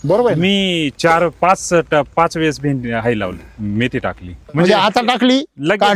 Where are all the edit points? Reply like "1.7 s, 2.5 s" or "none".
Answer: 4.5 s

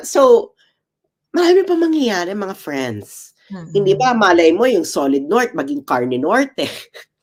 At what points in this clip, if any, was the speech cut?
none

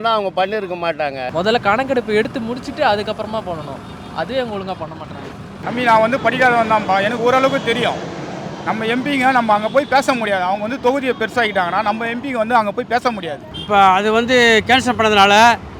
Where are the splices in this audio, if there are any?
1.2 s, 13.4 s

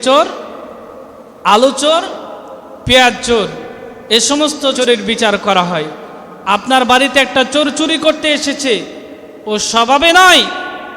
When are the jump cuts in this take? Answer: 4.8 s

